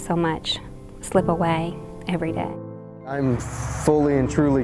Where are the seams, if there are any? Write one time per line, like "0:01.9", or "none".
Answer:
0:02.5